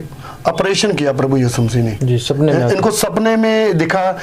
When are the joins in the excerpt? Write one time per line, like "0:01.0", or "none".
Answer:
0:02.0